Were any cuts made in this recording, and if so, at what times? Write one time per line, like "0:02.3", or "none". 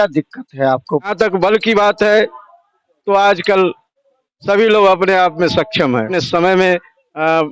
0:01.1
0:06.2